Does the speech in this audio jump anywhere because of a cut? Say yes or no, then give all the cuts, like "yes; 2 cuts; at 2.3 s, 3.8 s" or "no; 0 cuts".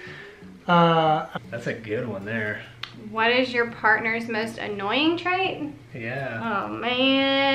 yes; 1 cut; at 1.3 s